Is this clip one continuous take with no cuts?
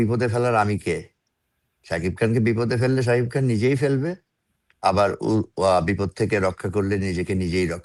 yes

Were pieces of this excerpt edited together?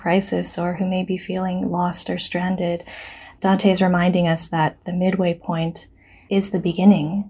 no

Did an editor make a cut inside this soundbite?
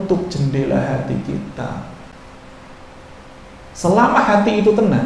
no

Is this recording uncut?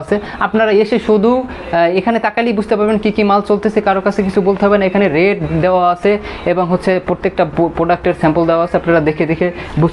yes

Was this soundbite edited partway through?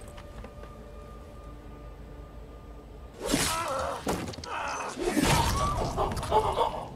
yes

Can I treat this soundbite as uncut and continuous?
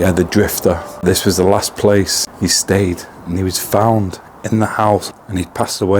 no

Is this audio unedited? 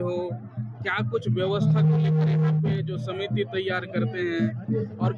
yes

